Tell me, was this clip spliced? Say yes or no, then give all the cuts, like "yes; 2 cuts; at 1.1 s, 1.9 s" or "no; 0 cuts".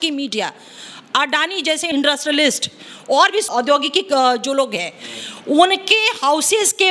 no; 0 cuts